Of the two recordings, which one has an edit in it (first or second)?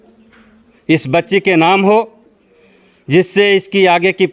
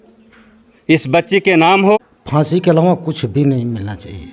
second